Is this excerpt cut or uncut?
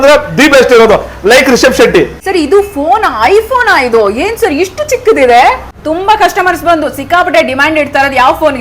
cut